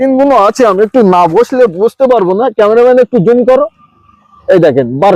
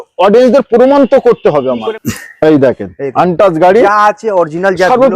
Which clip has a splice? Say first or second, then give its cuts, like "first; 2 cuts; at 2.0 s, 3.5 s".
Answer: second; 1 cut; at 1.9 s